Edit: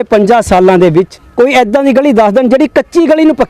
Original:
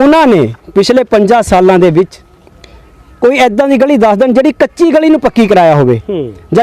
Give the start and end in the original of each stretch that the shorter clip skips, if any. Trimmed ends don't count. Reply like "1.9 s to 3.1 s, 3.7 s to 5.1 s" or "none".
2.2 s to 3.0 s